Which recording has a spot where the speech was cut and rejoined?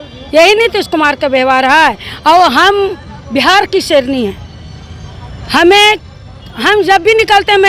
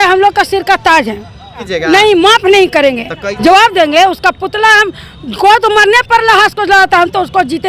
second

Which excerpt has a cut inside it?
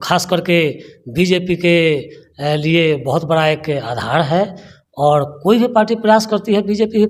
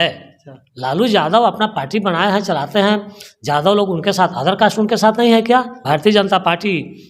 second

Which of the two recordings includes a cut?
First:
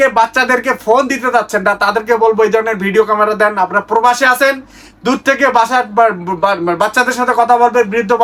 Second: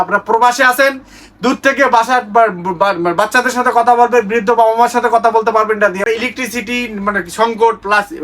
second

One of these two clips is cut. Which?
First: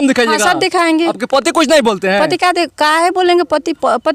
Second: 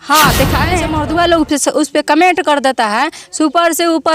second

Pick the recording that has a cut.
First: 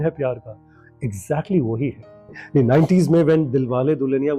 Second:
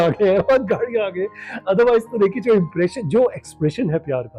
first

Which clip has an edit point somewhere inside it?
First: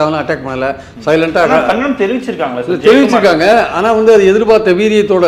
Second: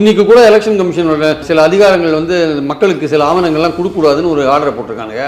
second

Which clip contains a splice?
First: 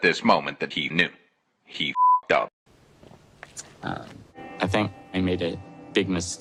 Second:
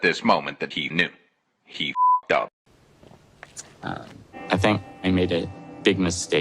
second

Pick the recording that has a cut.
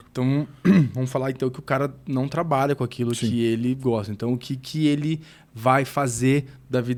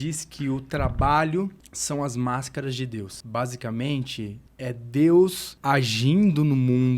second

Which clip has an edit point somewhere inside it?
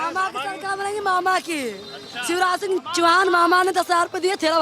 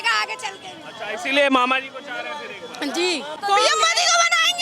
second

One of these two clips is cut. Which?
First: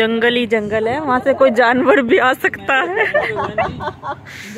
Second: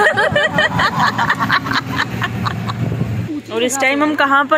second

